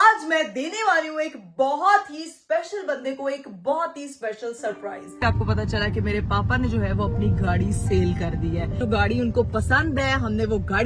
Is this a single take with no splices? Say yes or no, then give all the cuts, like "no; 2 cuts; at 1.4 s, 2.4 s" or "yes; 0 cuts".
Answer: no; 2 cuts; at 5.2 s, 8.8 s